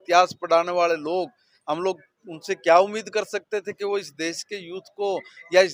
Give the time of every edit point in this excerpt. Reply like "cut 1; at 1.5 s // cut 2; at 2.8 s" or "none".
none